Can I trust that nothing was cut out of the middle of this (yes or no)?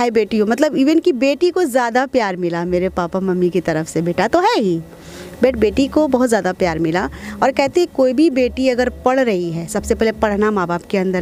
yes